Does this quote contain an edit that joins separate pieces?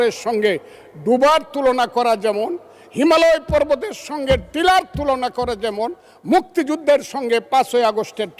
no; 0 cuts

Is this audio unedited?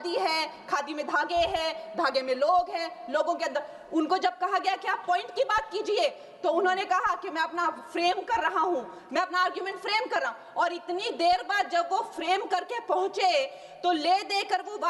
yes; 0 cuts

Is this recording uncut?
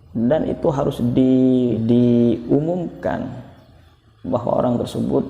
no; 1 cut; at 1.8 s

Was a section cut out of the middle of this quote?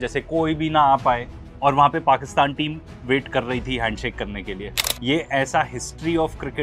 no; 0 cuts

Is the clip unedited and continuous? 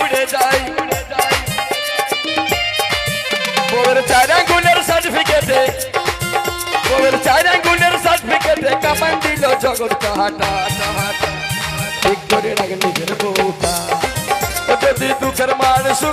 yes; 0 cuts

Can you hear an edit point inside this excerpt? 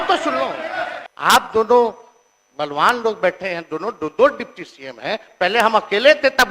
yes; 1 cut; at 1.0 s

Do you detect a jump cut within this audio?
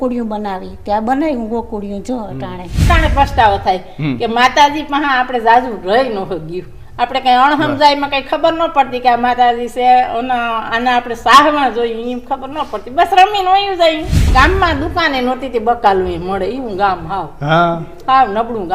yes; 2 cuts; at 2.9 s, 14.1 s

